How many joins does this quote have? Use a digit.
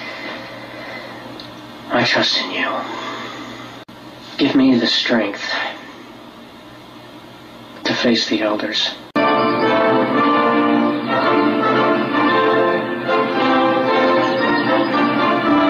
1